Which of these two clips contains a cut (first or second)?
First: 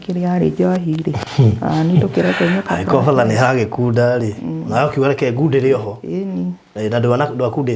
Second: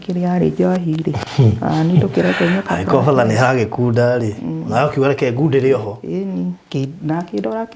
second